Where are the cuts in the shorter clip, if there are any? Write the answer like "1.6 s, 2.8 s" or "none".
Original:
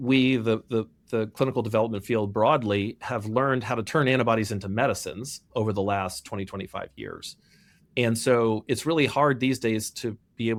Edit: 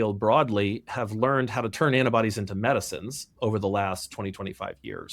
none